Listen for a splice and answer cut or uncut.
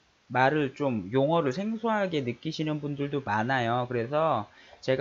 cut